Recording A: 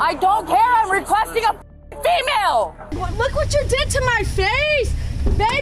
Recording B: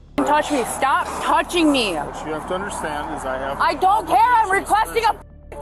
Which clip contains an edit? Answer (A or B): A